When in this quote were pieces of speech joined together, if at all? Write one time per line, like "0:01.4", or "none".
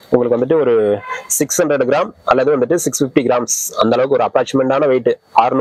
none